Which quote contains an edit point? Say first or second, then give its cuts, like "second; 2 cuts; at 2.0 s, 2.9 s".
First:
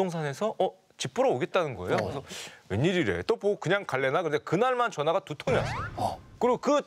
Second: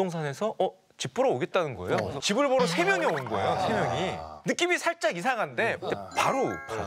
second; 2 cuts; at 2.2 s, 6.0 s